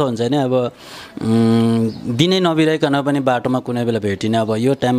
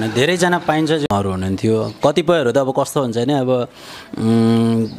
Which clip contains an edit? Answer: second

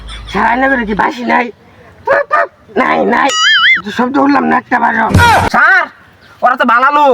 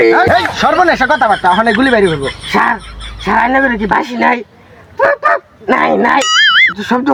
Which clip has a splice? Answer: first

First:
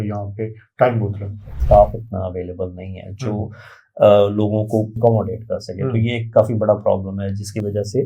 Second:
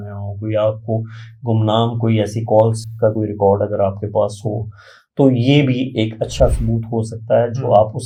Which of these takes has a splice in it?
first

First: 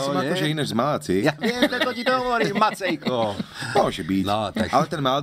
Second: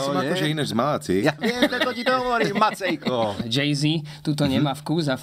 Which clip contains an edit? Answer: second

